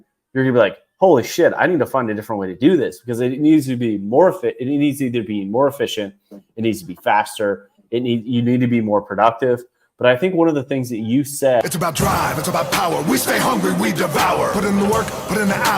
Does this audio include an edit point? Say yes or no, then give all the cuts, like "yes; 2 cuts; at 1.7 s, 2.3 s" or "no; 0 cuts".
yes; 1 cut; at 11.6 s